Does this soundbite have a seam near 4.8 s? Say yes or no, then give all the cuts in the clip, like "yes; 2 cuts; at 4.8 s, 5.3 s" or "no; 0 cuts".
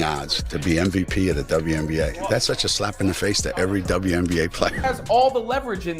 yes; 1 cut; at 4.8 s